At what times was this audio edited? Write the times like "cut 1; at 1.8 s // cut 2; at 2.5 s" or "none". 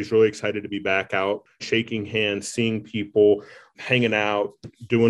cut 1; at 1.6 s // cut 2; at 3.7 s